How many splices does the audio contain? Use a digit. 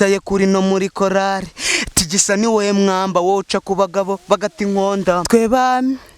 1